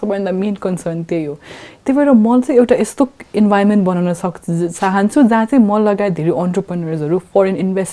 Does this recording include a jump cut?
no; 0 cuts

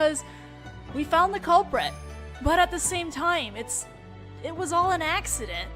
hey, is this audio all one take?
no; 1 cut; at 1.7 s

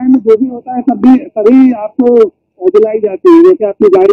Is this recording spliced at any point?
no; 0 cuts

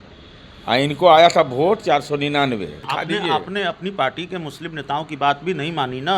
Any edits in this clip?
yes; 1 cut; at 2.8 s

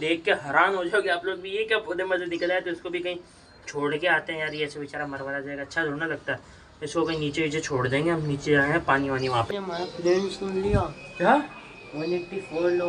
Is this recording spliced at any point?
yes; 1 cut; at 9.5 s

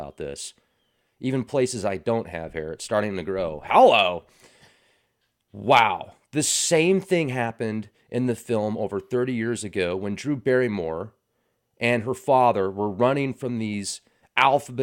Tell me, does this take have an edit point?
no; 0 cuts

